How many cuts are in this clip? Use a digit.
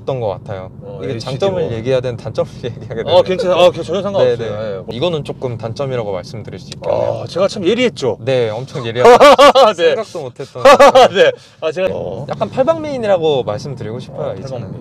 2